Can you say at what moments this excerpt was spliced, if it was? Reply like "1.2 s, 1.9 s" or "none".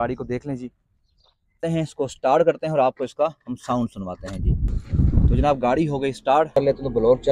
1.6 s, 6.5 s